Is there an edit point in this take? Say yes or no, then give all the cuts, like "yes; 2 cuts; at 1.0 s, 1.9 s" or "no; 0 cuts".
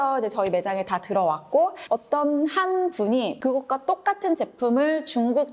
yes; 2 cuts; at 1.8 s, 3.4 s